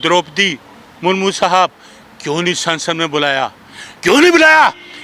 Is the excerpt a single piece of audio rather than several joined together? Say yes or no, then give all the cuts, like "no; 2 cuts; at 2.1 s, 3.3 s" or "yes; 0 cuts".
yes; 0 cuts